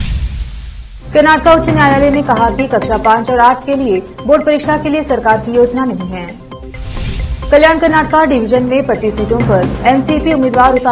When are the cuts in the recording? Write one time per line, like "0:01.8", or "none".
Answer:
0:01.0